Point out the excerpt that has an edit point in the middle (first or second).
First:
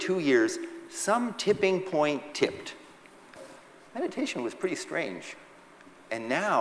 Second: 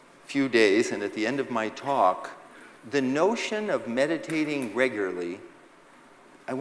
second